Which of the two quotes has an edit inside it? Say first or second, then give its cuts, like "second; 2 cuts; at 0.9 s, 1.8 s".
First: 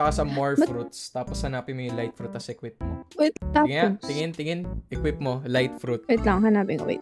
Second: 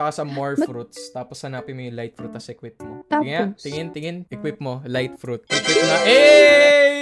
second; 3 cuts; at 3.0 s, 4.3 s, 5.5 s